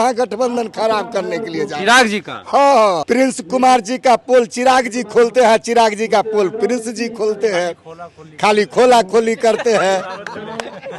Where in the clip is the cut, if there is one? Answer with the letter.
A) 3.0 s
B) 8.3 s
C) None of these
A